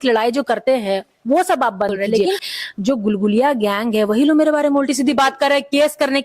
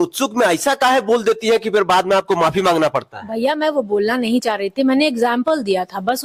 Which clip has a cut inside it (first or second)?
first